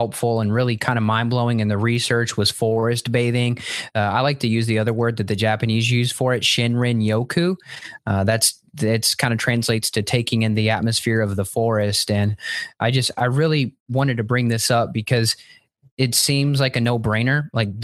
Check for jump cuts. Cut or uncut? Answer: uncut